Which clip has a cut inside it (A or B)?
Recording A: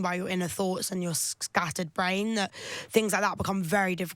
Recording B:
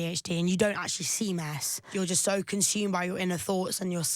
B